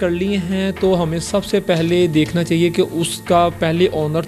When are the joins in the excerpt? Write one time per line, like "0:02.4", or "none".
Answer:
0:03.2